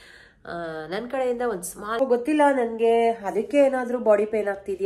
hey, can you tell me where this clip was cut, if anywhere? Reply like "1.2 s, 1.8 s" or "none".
2.0 s